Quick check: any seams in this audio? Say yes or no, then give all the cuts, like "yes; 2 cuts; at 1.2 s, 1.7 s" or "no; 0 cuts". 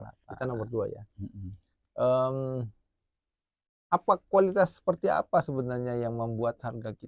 no; 0 cuts